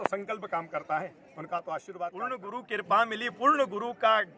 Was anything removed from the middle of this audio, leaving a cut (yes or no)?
yes